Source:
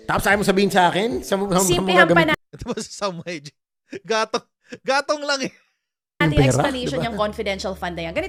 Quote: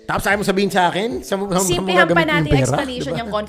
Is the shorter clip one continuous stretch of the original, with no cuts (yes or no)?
no